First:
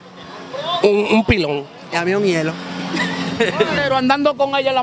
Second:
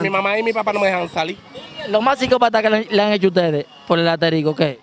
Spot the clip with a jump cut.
first; 1 cut; at 3.8 s

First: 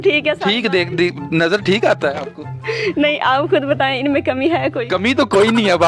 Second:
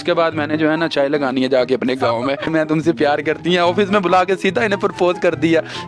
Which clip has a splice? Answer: second; 1 cut; at 2.5 s

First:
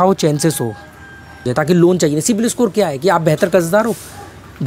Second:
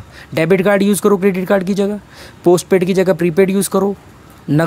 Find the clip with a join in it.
first; 1 cut; at 1.5 s

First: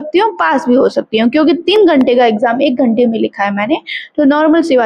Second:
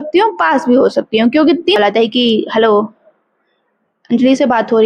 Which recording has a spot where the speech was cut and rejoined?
second; 1 cut; at 1.8 s

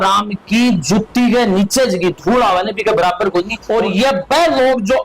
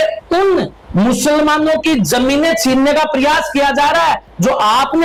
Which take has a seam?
first; 1 cut; at 3.6 s

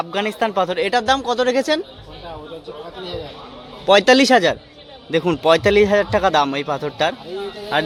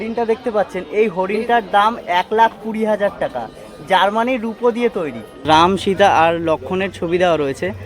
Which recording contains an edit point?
second; 1 cut; at 5.3 s

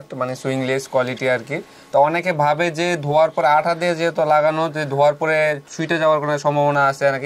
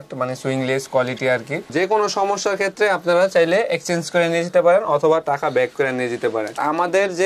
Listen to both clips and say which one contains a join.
second; 2 cuts; at 1.7 s, 6.6 s

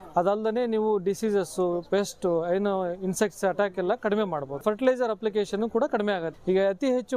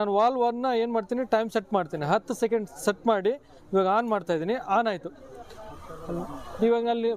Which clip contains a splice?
first; 2 cuts; at 4.6 s, 6.3 s

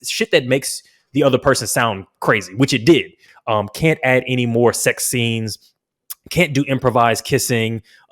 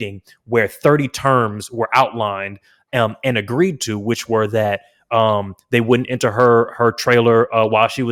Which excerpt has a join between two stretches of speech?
first; 1 cut; at 3.2 s

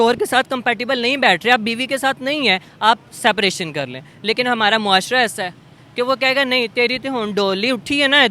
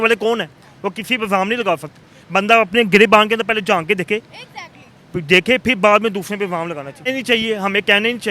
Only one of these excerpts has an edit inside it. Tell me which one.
second; 1 cut; at 7.1 s

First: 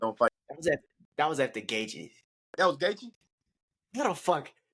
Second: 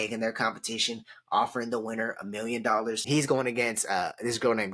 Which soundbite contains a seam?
second; 1 cut; at 3.0 s

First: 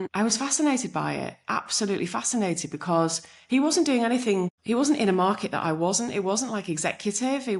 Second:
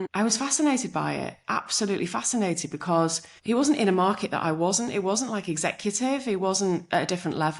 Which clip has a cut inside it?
second; 1 cut; at 3.4 s

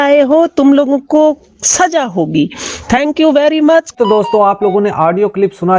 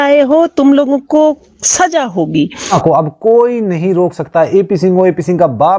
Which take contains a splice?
second; 1 cut; at 2.7 s

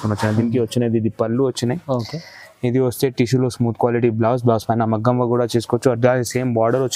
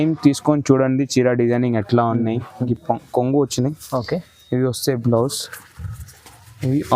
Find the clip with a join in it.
second; 1 cut; at 2.6 s

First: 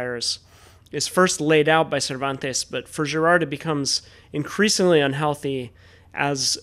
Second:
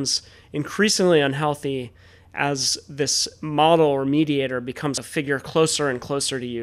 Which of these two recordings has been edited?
second; 1 cut; at 5.0 s

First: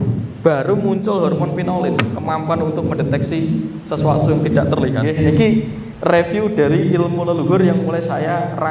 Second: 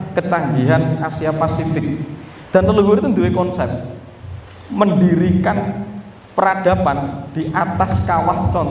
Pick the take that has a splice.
first; 1 cut; at 5.1 s

